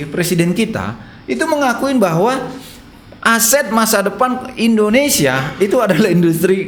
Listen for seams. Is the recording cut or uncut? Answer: uncut